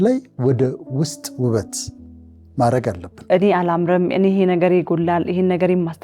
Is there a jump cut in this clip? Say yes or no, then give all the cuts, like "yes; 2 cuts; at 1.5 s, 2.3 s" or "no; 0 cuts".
yes; 1 cut; at 3.2 s